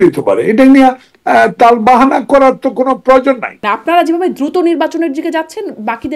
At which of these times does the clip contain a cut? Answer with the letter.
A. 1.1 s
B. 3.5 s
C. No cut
B